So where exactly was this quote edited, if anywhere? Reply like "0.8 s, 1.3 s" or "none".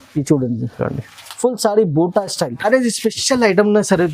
2.7 s